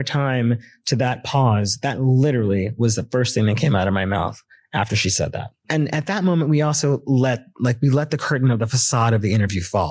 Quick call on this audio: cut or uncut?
cut